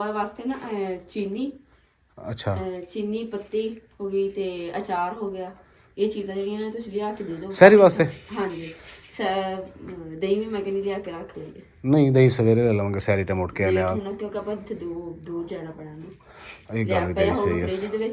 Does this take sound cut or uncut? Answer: uncut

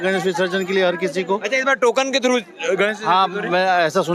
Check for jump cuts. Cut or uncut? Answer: uncut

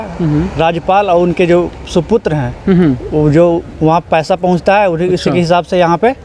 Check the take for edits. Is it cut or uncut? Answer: uncut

